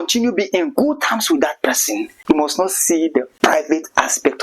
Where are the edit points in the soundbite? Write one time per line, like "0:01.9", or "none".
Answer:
0:02.1